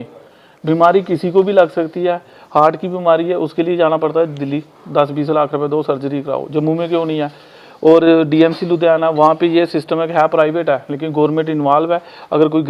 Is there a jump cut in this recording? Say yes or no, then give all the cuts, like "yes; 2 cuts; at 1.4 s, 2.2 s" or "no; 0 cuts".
no; 0 cuts